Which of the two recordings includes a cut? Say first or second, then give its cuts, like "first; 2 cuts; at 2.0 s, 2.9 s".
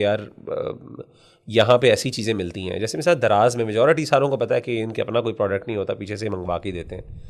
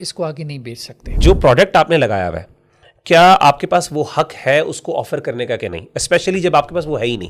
second; 1 cut; at 1.2 s